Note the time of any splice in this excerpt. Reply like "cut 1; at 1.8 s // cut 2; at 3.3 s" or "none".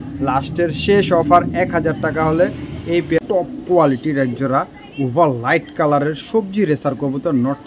cut 1; at 3.2 s